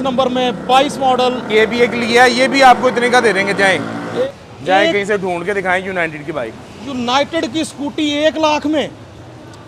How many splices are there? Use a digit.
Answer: 1